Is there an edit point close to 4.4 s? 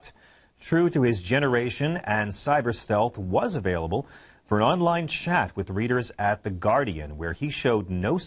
no; 1 cut; at 2.6 s

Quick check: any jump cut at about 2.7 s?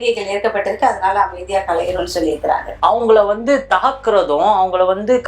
yes; 1 cut; at 2.7 s

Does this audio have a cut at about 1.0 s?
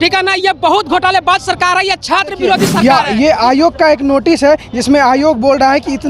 no; 1 cut; at 2.7 s

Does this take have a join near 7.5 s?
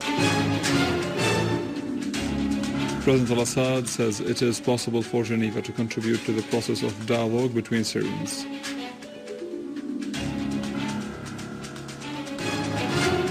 yes; 1 cut; at 7.5 s

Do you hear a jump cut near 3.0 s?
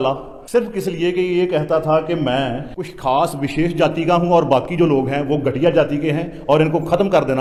no; 0 cuts

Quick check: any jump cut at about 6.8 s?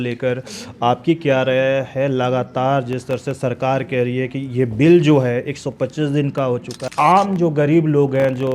yes; 1 cut; at 6.8 s

